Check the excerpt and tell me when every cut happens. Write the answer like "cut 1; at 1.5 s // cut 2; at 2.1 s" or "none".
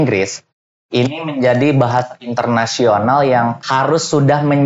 cut 1; at 3.6 s